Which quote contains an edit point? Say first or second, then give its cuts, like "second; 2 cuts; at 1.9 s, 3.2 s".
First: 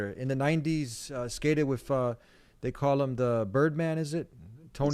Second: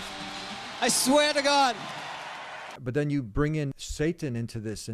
second; 2 cuts; at 2.7 s, 3.8 s